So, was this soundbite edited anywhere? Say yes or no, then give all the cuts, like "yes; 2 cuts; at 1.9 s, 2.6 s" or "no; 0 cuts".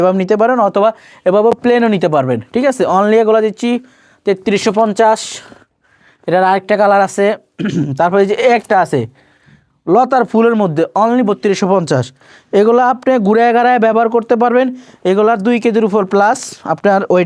no; 0 cuts